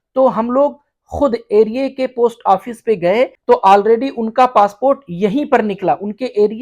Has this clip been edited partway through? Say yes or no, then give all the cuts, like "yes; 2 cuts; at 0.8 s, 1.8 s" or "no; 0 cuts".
yes; 1 cut; at 3.4 s